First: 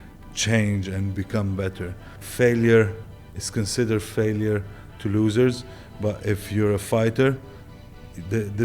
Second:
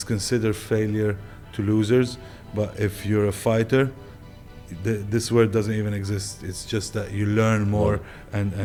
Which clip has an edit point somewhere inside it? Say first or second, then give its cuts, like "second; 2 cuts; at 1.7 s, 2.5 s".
first; 1 cut; at 2.2 s